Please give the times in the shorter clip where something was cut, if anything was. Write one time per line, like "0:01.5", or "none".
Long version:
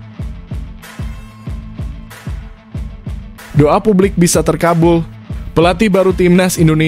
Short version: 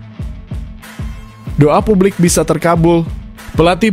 0:01.6